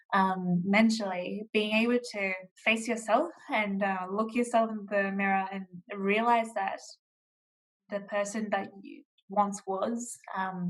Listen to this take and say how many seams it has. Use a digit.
1